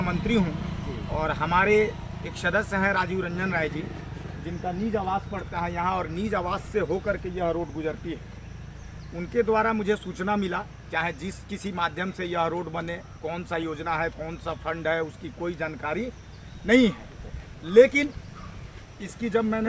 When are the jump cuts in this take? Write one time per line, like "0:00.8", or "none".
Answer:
none